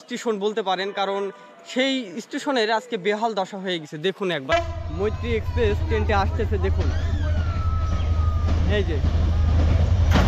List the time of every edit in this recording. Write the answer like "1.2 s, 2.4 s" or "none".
4.5 s